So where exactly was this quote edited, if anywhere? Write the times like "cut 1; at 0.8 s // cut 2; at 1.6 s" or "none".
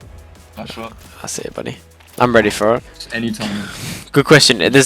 cut 1; at 2.9 s